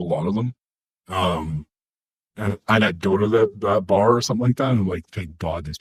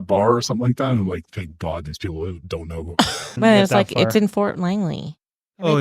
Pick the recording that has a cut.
second; 1 cut; at 3.2 s

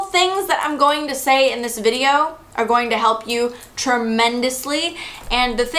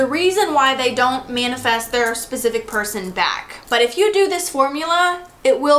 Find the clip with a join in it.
second; 1 cut; at 3.5 s

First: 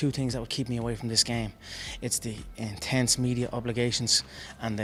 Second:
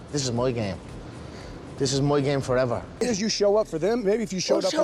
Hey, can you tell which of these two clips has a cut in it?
second; 1 cut; at 2.9 s

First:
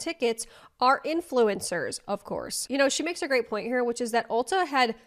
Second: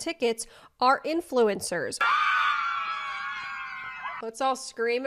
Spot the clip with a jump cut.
second; 2 cuts; at 2.0 s, 4.1 s

